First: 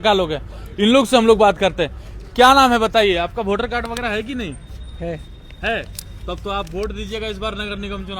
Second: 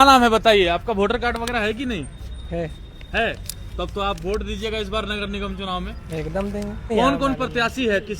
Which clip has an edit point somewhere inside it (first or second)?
second